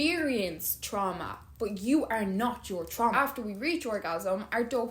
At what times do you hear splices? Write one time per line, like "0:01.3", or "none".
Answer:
0:03.1